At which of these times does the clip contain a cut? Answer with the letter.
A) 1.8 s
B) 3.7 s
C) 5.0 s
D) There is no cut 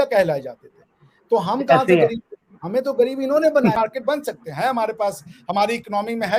B